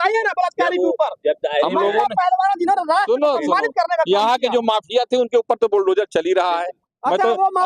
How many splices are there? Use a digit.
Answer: 0